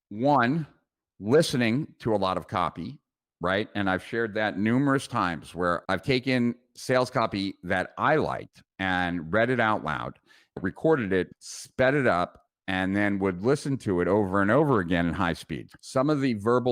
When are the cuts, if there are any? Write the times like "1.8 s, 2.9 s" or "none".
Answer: 5.8 s, 10.6 s, 11.3 s, 15.6 s